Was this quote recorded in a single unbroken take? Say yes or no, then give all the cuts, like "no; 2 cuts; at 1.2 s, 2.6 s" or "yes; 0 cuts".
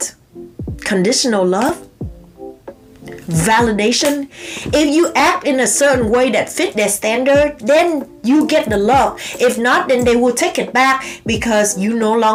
yes; 0 cuts